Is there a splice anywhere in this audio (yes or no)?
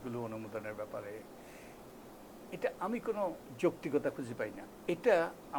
yes